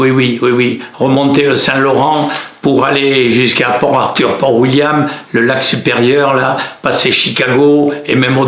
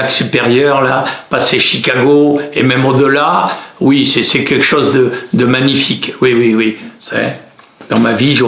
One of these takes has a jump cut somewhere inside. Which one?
second; 1 cut; at 6.9 s

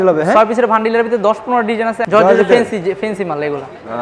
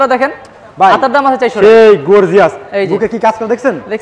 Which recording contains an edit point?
first; 1 cut; at 2.0 s

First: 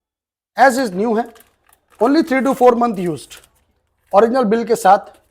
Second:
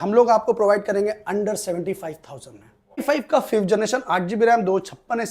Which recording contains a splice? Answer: second; 1 cut; at 3.0 s

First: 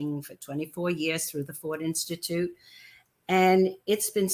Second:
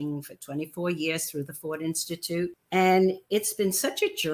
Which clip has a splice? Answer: second; 1 cut; at 2.6 s

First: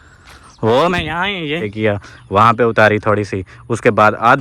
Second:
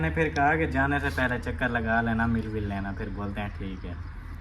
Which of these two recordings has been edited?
first; 1 cut; at 1.6 s

